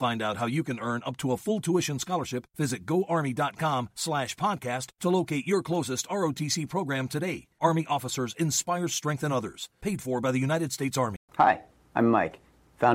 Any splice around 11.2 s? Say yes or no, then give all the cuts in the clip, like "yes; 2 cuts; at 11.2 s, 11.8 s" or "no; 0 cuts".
yes; 1 cut; at 11.2 s